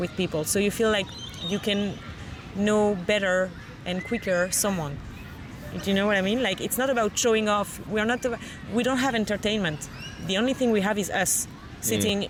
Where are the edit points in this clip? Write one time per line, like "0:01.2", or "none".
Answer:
none